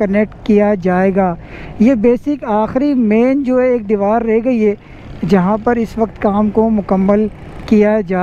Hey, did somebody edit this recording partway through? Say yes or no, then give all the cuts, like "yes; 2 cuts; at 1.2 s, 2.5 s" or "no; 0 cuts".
no; 0 cuts